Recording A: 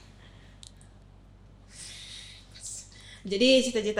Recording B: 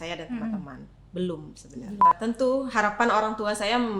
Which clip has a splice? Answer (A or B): B